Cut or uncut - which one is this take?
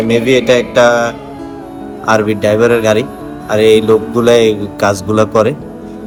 uncut